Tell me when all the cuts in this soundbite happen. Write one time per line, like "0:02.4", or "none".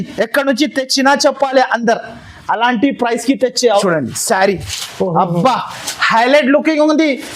0:03.8